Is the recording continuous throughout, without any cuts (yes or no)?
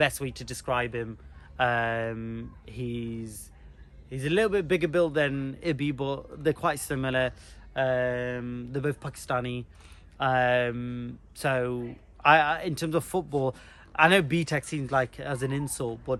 yes